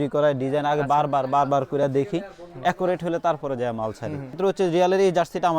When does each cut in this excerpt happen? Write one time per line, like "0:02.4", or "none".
0:04.4